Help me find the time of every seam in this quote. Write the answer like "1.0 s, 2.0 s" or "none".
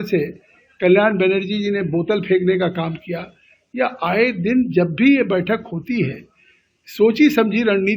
none